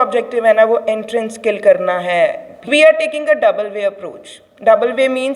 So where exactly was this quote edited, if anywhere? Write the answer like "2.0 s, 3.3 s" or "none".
2.6 s